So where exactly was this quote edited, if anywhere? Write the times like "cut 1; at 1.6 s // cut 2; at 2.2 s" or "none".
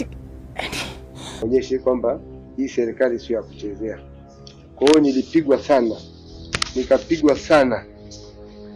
cut 1; at 1.4 s